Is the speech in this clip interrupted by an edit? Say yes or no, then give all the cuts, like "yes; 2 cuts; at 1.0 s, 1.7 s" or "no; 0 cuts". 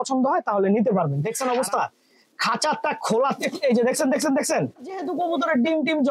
yes; 2 cuts; at 1.2 s, 5.1 s